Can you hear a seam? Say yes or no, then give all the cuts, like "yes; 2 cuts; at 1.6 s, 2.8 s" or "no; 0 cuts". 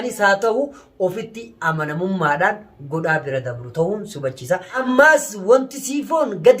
yes; 1 cut; at 4.8 s